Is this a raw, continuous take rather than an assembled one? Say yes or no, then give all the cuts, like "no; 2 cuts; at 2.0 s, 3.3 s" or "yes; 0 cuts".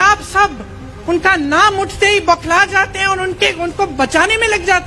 yes; 0 cuts